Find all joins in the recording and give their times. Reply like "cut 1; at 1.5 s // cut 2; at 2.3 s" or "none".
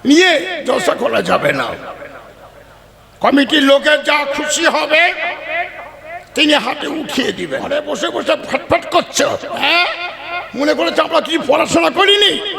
cut 1; at 7.7 s